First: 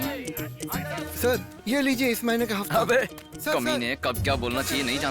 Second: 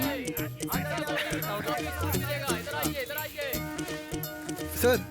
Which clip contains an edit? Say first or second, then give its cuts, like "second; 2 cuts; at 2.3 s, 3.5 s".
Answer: first; 1 cut; at 1.0 s